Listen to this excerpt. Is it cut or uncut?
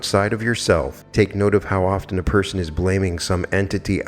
cut